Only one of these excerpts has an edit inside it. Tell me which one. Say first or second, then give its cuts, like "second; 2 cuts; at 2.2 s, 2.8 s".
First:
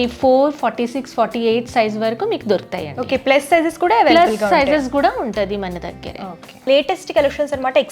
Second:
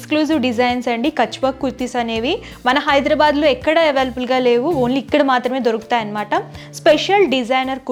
first; 1 cut; at 6.7 s